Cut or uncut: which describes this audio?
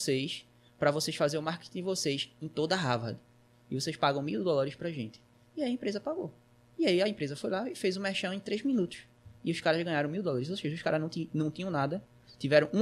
uncut